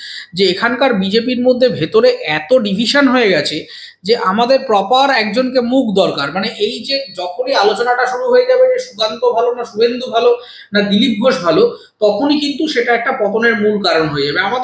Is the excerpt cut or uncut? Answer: uncut